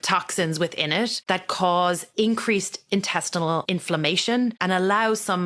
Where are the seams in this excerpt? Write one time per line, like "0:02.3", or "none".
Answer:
0:01.2
0:02.1
0:03.6
0:04.6